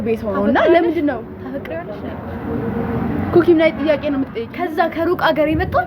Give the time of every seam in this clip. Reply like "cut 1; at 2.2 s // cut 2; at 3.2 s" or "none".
cut 1; at 4.4 s